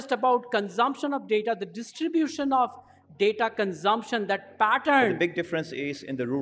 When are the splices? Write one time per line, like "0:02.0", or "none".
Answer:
0:05.2